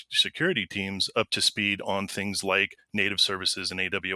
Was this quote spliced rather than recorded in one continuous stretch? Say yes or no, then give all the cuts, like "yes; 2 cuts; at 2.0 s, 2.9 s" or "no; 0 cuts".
no; 0 cuts